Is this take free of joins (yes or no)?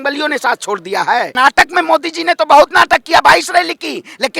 no